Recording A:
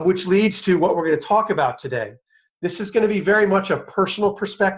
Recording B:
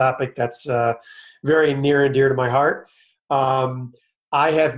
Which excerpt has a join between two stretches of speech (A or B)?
A